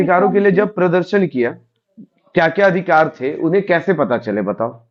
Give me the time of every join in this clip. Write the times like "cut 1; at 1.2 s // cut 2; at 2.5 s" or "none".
none